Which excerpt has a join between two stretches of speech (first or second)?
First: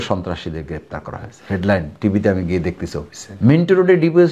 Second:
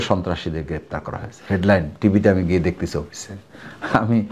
first